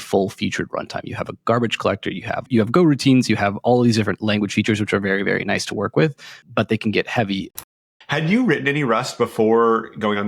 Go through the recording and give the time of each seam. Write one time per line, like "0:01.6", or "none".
0:02.5
0:06.3
0:07.6